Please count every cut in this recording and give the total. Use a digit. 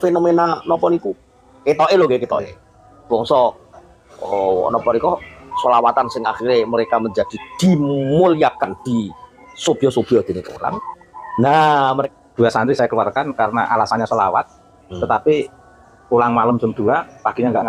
1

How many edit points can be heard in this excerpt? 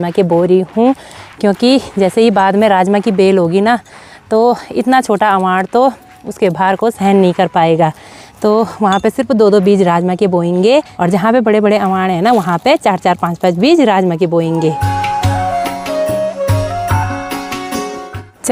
0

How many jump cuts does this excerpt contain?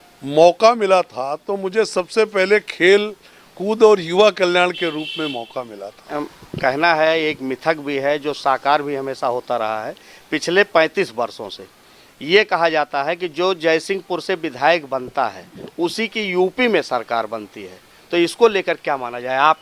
1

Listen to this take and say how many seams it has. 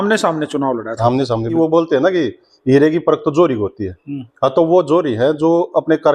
1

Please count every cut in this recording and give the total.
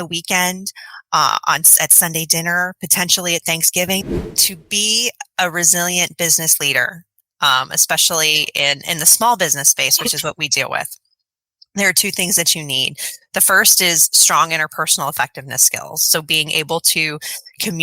1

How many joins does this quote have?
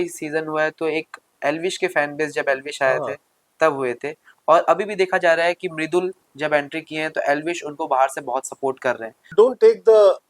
1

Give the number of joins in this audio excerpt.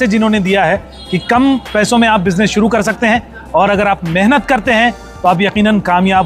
0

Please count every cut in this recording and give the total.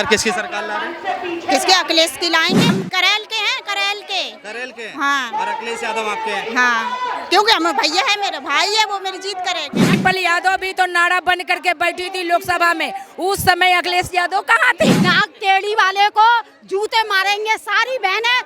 3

